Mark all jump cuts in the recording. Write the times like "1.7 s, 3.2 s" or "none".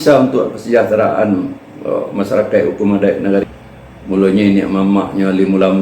3.4 s